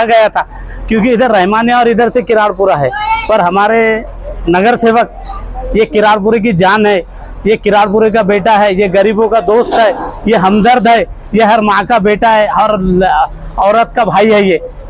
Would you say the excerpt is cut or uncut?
uncut